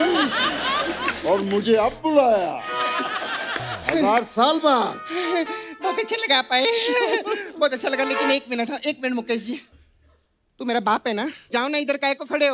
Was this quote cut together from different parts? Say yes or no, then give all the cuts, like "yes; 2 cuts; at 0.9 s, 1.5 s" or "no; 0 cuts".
no; 0 cuts